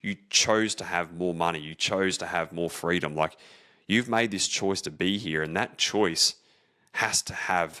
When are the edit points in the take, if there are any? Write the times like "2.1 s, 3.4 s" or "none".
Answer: none